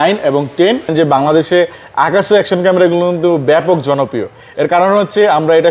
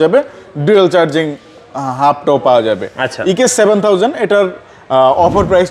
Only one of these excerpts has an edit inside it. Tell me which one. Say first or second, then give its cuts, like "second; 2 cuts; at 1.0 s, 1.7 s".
first; 1 cut; at 0.9 s